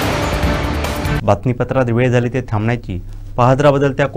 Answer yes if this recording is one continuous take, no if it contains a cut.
yes